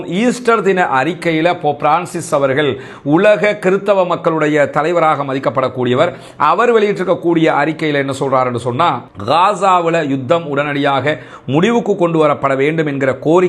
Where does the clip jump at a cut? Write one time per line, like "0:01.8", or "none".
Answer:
none